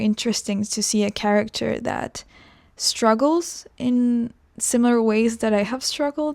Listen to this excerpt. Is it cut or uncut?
uncut